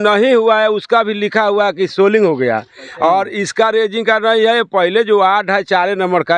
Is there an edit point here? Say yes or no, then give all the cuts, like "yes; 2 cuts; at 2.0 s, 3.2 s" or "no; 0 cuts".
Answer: no; 0 cuts